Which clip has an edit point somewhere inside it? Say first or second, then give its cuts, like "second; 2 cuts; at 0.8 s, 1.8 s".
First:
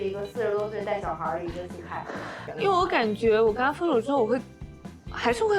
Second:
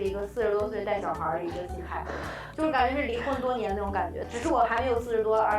first; 1 cut; at 2.5 s